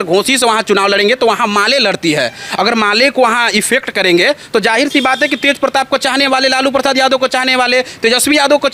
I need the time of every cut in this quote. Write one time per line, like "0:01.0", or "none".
none